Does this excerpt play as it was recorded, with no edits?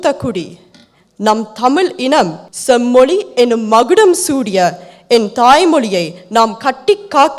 no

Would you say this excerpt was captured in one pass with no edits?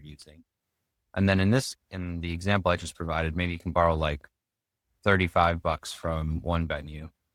yes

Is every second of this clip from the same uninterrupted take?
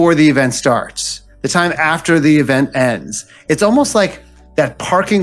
yes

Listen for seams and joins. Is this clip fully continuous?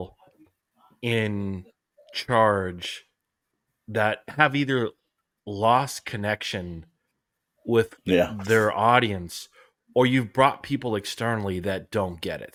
yes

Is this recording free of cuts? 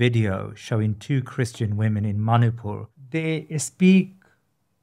no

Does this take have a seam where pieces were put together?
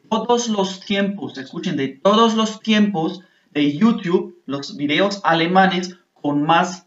no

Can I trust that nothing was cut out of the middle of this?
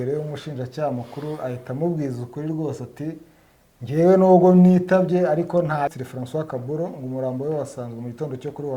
no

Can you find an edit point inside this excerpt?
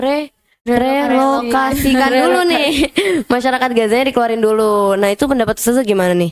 no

